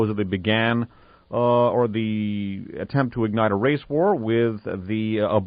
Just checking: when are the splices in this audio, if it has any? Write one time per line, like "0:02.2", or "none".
0:03.9